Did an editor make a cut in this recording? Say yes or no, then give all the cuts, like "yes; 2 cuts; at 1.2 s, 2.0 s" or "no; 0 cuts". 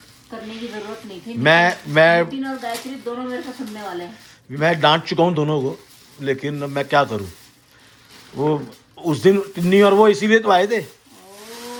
no; 0 cuts